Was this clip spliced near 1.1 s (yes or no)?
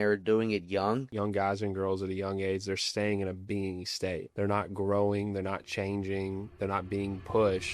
yes